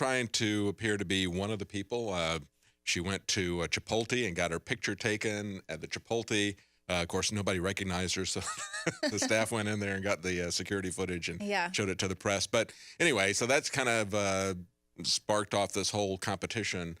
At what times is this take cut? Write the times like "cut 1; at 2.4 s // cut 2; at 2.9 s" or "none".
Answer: cut 1; at 13.9 s